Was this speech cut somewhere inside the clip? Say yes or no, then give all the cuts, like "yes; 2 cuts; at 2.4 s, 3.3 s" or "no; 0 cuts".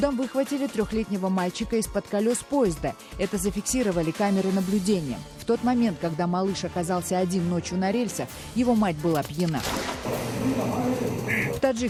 no; 0 cuts